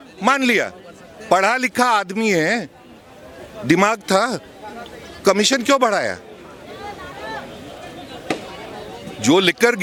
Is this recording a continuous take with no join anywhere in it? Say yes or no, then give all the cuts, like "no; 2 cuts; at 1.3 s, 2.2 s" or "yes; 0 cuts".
yes; 0 cuts